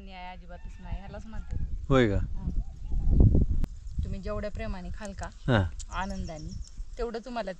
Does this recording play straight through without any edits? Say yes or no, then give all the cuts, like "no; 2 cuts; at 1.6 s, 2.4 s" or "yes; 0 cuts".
no; 1 cut; at 3.6 s